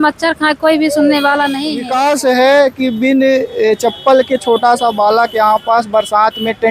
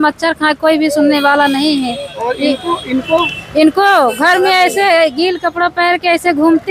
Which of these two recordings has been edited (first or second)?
first